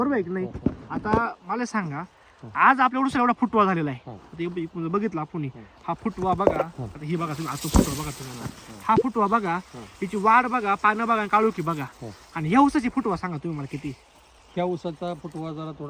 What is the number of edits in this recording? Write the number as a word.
zero